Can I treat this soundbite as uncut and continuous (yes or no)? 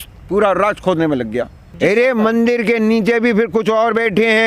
no